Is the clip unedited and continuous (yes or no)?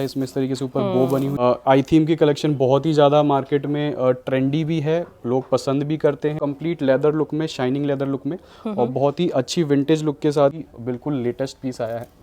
no